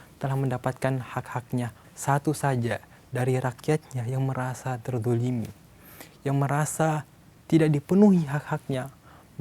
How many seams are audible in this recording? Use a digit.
1